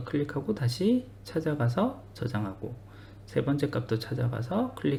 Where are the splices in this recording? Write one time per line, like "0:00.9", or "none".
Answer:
none